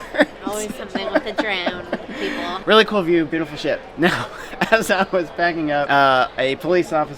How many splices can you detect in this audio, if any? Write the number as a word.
one